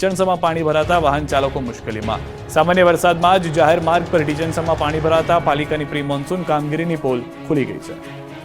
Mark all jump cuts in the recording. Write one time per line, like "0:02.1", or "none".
none